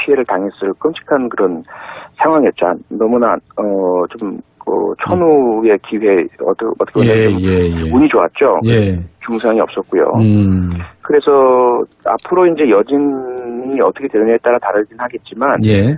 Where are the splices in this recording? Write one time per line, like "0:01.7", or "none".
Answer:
none